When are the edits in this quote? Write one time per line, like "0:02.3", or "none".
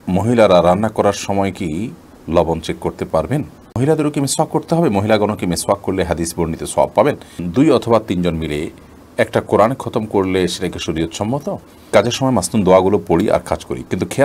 0:03.8
0:07.4
0:11.9